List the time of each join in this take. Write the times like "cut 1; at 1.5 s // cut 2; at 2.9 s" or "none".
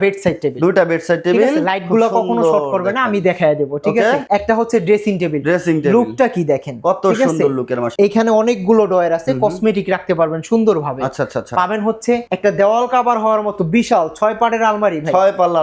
none